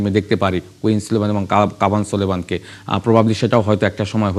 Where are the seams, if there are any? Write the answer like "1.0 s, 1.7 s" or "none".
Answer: none